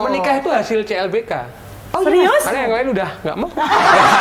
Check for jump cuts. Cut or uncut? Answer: uncut